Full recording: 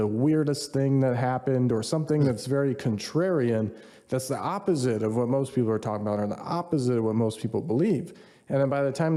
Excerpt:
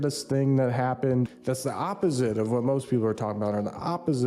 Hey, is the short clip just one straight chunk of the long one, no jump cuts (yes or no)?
no